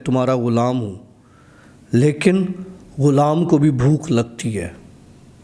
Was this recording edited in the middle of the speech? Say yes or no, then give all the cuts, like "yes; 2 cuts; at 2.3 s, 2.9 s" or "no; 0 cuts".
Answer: no; 0 cuts